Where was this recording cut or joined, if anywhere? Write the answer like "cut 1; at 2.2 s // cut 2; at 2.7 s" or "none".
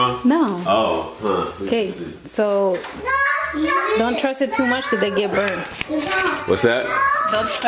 none

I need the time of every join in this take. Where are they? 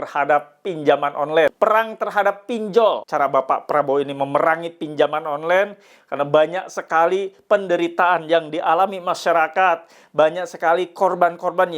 cut 1; at 1.5 s // cut 2; at 3.0 s

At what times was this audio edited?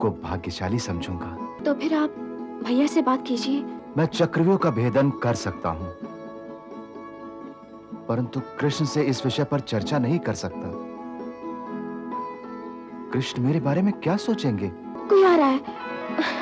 cut 1; at 1.5 s // cut 2; at 3.8 s // cut 3; at 14.9 s

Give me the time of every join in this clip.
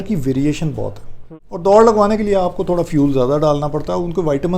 cut 1; at 1.2 s

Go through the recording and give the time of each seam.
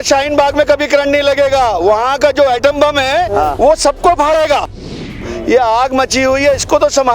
cut 1; at 5.1 s

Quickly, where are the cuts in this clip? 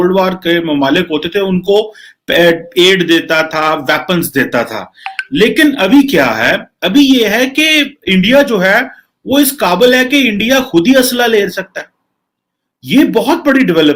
none

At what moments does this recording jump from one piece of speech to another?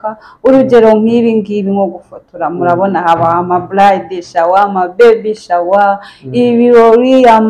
none

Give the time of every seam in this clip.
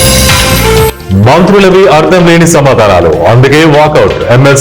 cut 1; at 1.0 s

